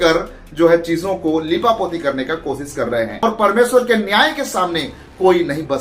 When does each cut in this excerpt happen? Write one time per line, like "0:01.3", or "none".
0:03.1